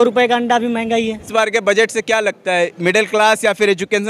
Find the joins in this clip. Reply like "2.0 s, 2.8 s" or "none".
1.3 s